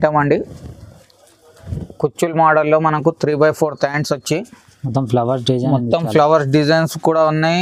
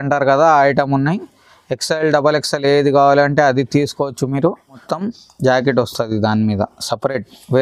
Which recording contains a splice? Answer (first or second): second